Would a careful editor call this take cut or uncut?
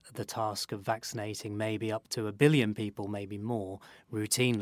uncut